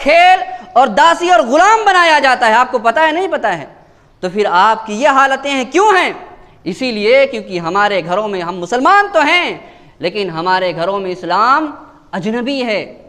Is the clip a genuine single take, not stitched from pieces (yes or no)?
yes